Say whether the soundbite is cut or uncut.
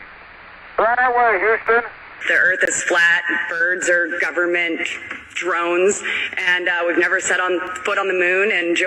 cut